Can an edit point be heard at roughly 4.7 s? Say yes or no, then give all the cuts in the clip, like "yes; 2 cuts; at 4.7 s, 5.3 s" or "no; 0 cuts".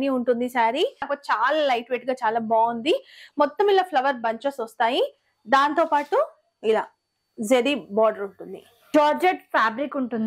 no; 2 cuts; at 1.1 s, 8.9 s